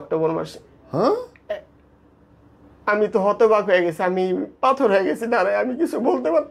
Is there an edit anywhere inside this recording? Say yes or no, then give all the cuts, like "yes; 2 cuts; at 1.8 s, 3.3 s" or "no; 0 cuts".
no; 0 cuts